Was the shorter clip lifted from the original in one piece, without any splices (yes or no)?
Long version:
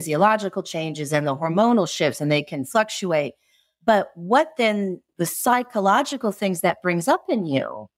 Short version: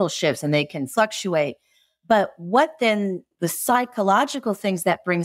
yes